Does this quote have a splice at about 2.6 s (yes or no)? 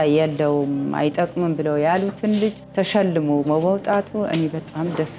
yes